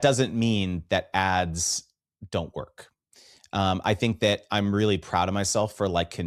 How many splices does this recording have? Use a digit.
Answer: 0